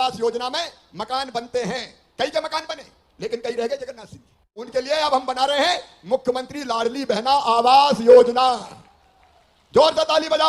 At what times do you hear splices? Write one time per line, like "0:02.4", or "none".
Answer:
0:04.4